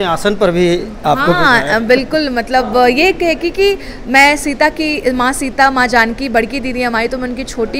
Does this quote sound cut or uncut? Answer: uncut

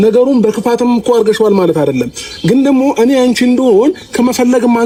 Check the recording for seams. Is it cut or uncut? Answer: uncut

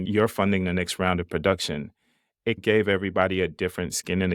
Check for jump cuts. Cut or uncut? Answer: uncut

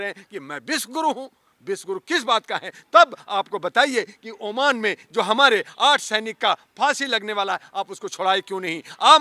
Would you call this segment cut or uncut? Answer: uncut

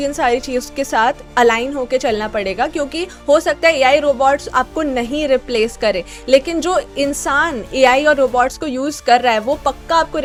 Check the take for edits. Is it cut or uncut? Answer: uncut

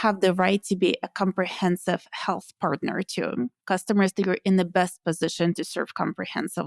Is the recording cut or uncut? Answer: uncut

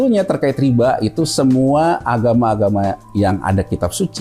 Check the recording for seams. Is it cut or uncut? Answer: uncut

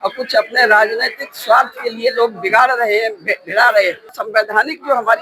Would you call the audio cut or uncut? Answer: cut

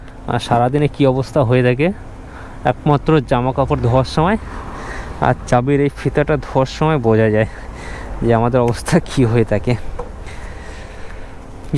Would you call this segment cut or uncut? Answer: uncut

